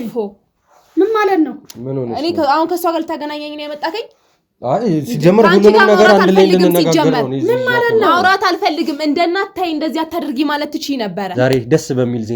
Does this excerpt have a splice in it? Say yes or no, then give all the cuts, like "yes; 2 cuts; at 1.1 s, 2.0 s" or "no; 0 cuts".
yes; 1 cut; at 11.3 s